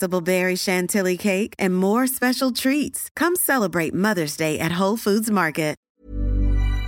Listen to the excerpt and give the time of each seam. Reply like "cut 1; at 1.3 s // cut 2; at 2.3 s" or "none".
cut 1; at 5.8 s

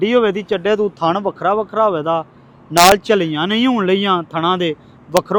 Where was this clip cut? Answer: none

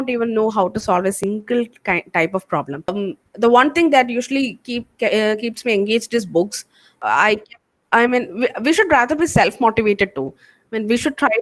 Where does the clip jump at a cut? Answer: cut 1; at 2.9 s // cut 2; at 7.0 s

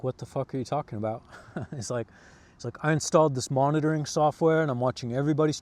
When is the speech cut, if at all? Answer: none

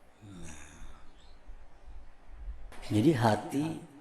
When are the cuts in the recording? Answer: cut 1; at 2.7 s

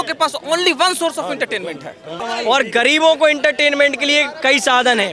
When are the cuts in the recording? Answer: cut 1; at 2.1 s

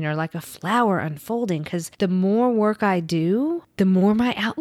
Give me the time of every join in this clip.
cut 1; at 1.9 s // cut 2; at 3.7 s

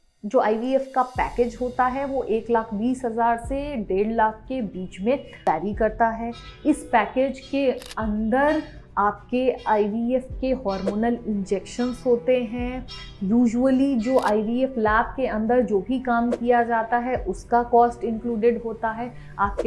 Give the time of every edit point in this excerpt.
none

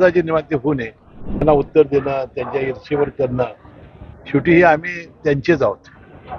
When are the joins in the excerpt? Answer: cut 1; at 1.4 s

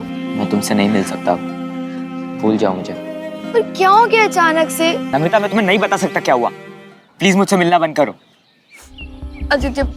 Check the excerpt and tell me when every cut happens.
cut 1; at 5.1 s

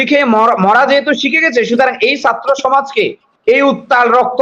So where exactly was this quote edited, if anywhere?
none

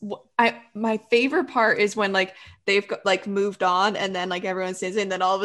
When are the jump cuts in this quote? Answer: none

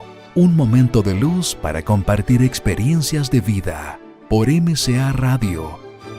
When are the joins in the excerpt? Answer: none

